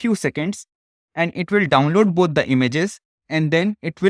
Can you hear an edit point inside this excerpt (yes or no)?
no